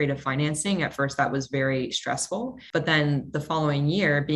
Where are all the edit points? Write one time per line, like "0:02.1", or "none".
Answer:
0:02.6